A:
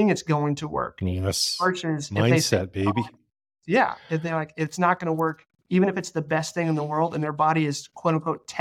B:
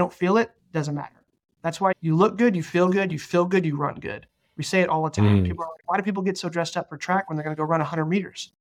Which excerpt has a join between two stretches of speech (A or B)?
B